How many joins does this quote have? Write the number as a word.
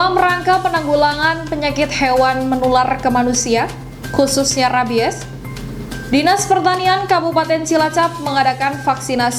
zero